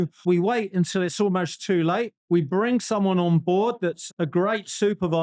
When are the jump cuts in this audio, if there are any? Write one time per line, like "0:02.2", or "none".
0:04.0